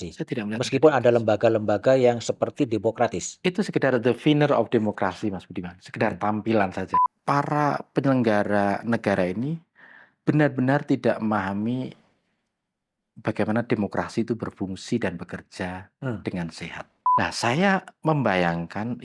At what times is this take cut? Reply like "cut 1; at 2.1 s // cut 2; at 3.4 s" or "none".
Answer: cut 1; at 7.0 s // cut 2; at 17.0 s